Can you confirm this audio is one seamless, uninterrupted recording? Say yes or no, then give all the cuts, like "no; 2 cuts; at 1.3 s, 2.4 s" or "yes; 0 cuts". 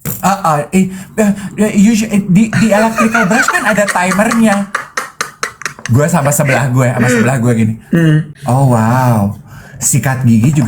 no; 1 cut; at 8.3 s